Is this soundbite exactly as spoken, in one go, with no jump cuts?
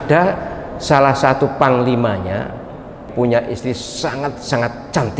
no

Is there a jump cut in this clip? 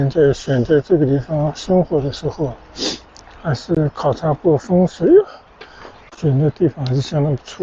no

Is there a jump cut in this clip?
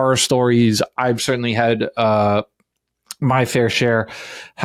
no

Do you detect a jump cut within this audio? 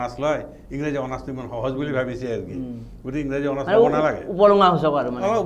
no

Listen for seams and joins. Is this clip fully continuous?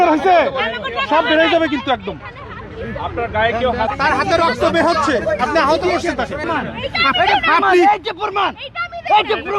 no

